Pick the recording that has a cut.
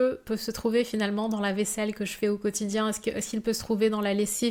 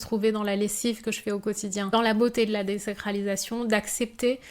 second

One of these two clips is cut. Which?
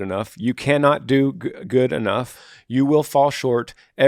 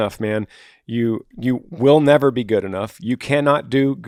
first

